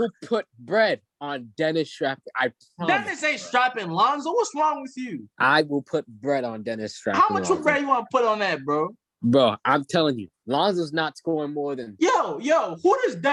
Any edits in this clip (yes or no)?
no